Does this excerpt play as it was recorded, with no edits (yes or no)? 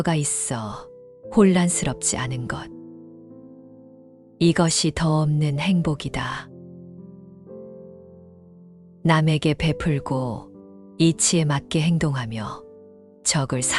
no